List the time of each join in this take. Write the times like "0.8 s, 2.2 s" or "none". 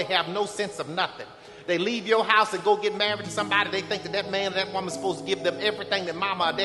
none